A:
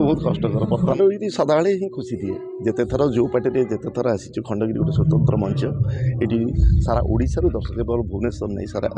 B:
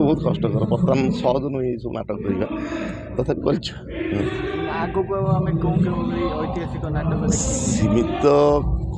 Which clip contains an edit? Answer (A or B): A